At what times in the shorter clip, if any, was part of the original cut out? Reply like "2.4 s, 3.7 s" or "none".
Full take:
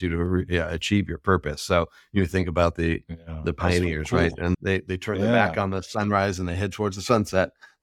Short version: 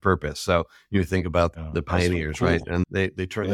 1.5 s